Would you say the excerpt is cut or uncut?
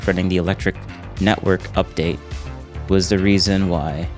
uncut